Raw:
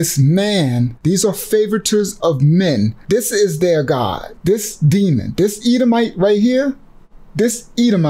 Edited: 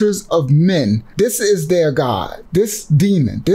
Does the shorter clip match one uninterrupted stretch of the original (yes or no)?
yes